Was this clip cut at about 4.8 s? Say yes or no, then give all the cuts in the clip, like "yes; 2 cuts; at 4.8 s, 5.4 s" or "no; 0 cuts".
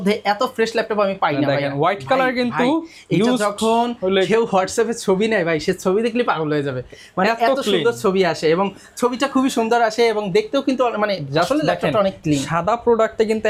no; 0 cuts